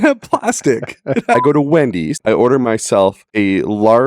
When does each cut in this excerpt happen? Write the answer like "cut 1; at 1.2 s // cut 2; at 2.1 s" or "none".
cut 1; at 1.4 s // cut 2; at 2.1 s // cut 3; at 3.2 s

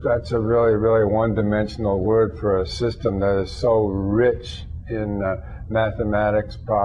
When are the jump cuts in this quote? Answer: none

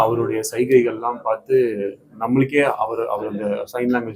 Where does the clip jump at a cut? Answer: none

